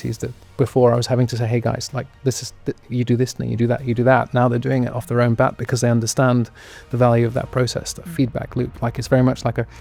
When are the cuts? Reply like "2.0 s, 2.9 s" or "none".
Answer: none